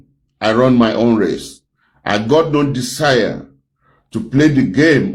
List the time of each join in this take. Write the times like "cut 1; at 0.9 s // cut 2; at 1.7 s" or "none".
none

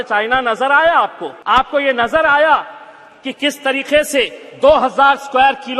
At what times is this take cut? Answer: cut 1; at 1.3 s

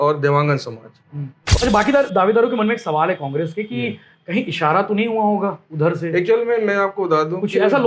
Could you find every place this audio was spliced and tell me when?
cut 1; at 1.5 s

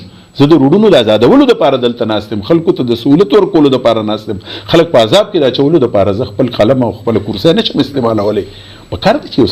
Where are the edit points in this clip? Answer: none

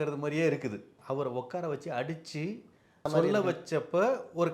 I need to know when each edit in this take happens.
cut 1; at 0.9 s // cut 2; at 3.1 s

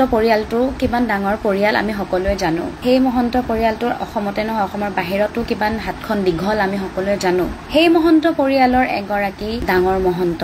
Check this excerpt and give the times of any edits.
none

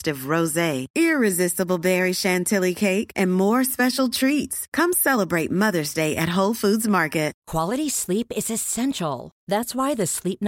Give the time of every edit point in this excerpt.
cut 1; at 7.4 s

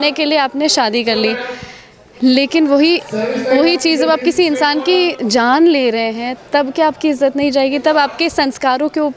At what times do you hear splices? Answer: none

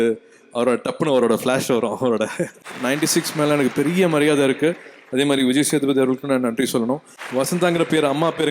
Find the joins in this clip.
cut 1; at 2.7 s // cut 2; at 7.1 s

